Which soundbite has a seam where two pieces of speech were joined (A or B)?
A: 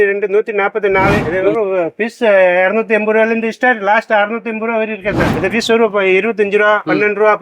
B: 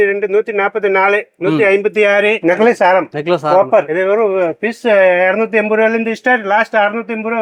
A